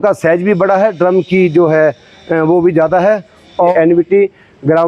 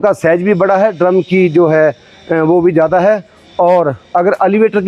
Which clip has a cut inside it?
first; 1 cut; at 3.7 s

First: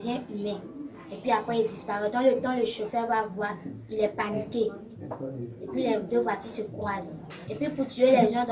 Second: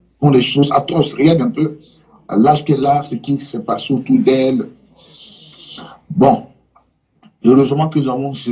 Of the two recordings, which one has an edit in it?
first; 1 cut; at 7.5 s

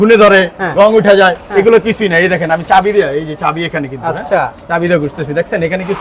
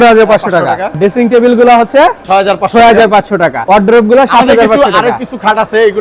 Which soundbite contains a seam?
second; 2 cuts; at 1.0 s, 3.6 s

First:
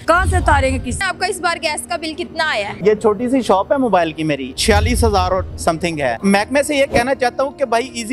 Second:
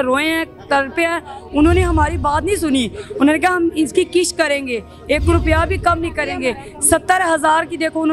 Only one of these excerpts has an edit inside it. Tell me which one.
first; 4 cuts; at 1.0 s, 2.8 s, 4.5 s, 6.2 s

